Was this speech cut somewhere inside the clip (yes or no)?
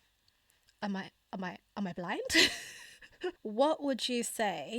yes